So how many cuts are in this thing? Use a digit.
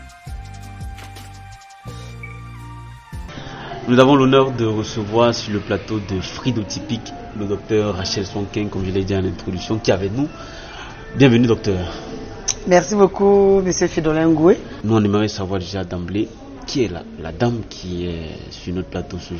2